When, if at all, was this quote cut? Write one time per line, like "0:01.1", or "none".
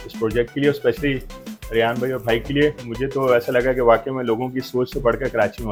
none